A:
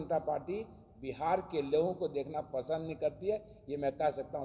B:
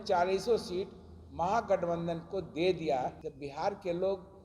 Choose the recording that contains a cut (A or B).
B